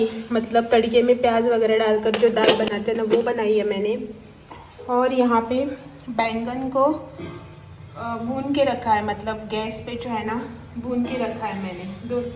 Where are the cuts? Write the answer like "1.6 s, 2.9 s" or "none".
none